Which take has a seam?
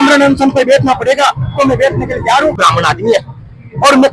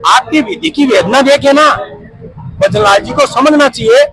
first; 1 cut; at 2.6 s

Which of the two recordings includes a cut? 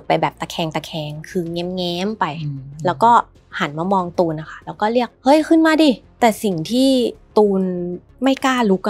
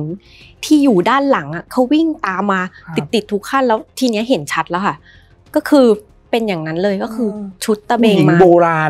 first; 3 cuts; at 6.1 s, 7.2 s, 8.0 s

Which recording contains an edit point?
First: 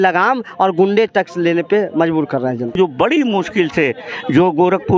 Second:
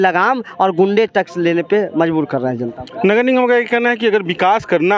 first; 1 cut; at 2.8 s

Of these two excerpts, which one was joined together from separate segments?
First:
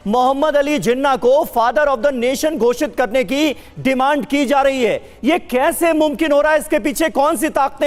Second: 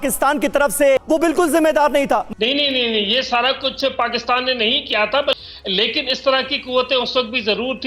second; 3 cuts; at 1.0 s, 2.3 s, 5.3 s

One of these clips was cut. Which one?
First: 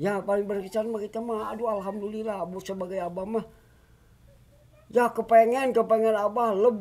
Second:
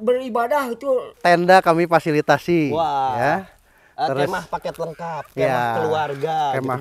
second; 1 cut; at 1.1 s

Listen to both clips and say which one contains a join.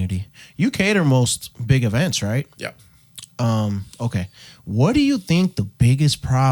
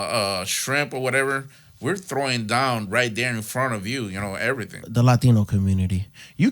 second; 1 cut; at 4.8 s

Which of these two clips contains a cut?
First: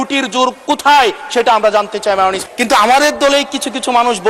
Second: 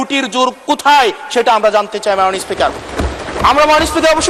first; 1 cut; at 2.4 s

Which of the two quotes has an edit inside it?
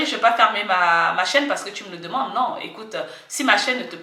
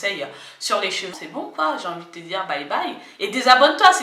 second; 1 cut; at 1.1 s

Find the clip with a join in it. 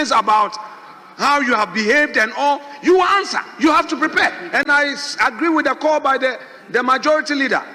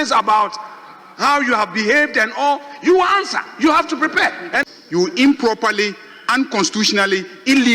second; 1 cut; at 4.6 s

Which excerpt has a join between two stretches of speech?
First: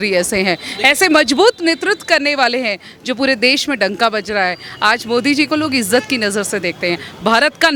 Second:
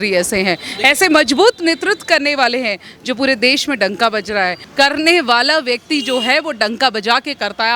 second; 1 cut; at 4.6 s

